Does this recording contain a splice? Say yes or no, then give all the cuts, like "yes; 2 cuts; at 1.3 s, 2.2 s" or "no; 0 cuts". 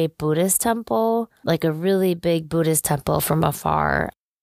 yes; 1 cut; at 1.3 s